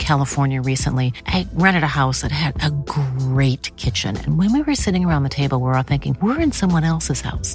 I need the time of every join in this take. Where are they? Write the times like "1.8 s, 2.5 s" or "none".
none